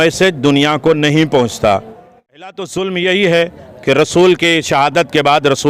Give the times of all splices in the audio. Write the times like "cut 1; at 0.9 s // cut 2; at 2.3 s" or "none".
cut 1; at 2.4 s